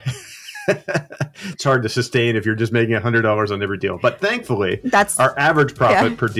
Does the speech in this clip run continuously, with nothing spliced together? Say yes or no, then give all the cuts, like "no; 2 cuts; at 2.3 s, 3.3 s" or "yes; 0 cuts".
yes; 0 cuts